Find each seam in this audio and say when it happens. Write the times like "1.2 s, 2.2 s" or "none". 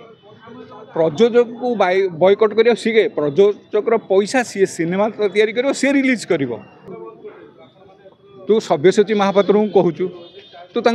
7.0 s